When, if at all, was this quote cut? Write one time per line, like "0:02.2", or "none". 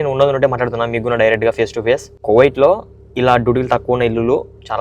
0:02.1